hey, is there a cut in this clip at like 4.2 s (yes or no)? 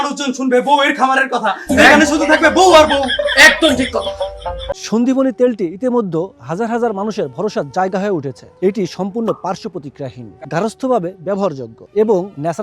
yes